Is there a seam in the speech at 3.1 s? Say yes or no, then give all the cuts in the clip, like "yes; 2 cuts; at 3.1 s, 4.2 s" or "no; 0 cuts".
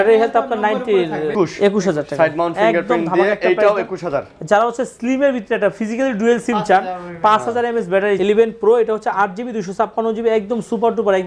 no; 2 cuts; at 1.3 s, 8.2 s